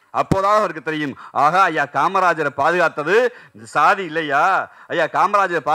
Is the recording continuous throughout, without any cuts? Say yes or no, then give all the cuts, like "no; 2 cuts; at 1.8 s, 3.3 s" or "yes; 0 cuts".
yes; 0 cuts